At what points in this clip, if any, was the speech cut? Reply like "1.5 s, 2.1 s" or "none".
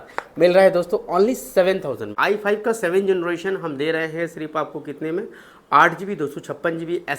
2.1 s